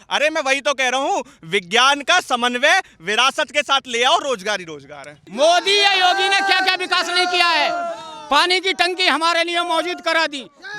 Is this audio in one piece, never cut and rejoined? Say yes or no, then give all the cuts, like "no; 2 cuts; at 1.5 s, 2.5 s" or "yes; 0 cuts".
no; 1 cut; at 5.2 s